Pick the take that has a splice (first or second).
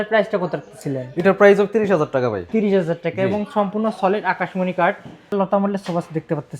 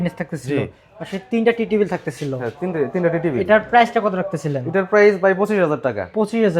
first